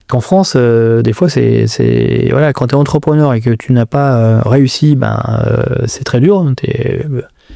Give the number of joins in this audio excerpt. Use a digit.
0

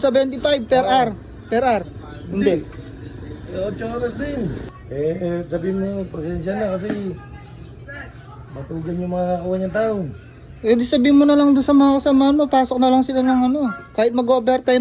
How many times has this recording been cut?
1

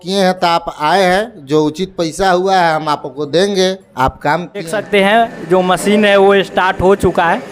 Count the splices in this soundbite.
1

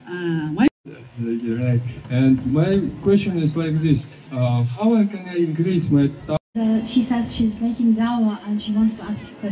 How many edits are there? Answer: 2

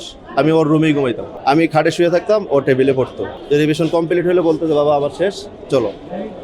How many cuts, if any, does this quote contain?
2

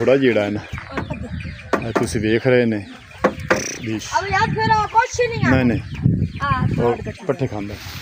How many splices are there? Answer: 0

